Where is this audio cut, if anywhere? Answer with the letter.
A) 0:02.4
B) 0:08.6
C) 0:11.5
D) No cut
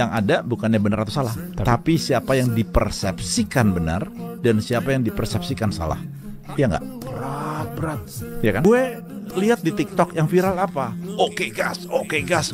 B